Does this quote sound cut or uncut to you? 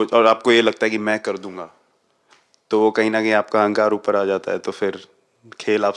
uncut